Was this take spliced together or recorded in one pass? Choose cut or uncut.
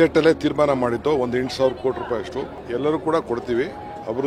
cut